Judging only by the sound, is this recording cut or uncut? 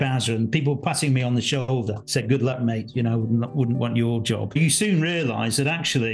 cut